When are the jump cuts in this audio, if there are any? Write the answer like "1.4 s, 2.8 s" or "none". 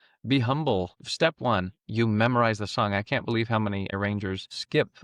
1.0 s, 4.0 s